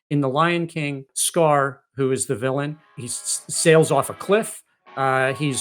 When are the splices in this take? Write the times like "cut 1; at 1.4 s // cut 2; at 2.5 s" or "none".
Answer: cut 1; at 1.2 s // cut 2; at 3.0 s